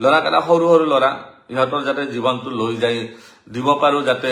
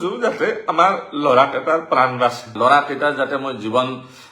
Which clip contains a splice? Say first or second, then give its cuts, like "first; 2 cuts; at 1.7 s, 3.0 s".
second; 1 cut; at 2.5 s